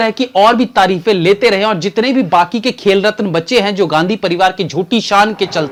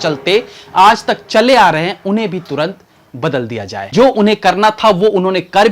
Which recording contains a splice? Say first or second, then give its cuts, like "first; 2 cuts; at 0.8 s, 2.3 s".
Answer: second; 1 cut; at 3.8 s